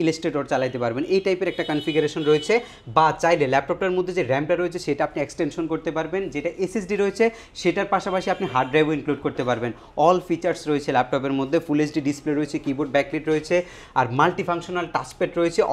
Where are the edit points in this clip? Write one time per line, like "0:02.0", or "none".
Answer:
none